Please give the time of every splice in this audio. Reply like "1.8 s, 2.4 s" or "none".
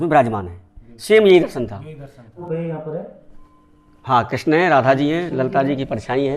2.4 s